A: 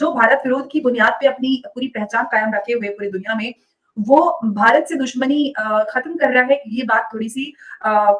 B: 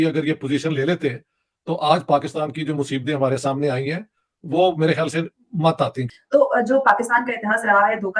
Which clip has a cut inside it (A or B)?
B